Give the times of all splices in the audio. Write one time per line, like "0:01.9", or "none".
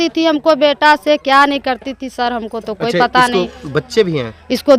none